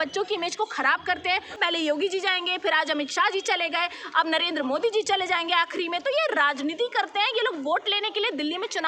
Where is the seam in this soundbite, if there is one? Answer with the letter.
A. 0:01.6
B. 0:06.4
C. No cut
A